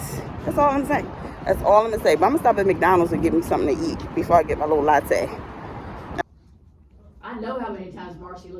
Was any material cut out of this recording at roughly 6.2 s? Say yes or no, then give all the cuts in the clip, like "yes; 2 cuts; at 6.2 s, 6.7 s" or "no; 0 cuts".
yes; 1 cut; at 6.2 s